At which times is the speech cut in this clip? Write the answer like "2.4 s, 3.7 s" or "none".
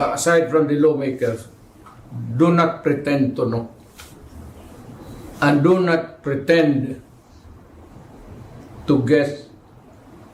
none